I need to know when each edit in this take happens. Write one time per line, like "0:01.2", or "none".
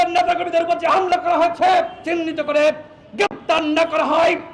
0:02.0